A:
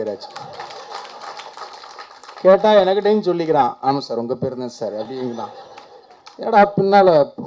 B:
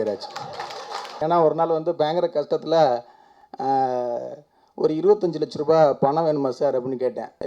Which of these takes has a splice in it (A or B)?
B